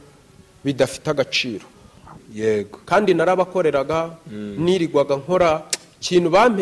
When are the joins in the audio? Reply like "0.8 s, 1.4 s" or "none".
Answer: 2.0 s